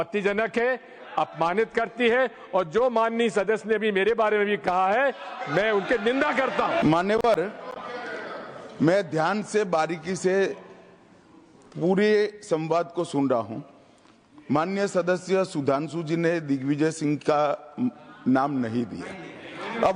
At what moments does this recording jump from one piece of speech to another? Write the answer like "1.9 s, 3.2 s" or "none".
6.8 s